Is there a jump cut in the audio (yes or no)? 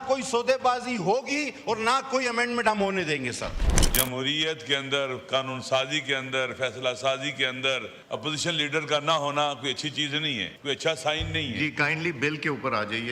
yes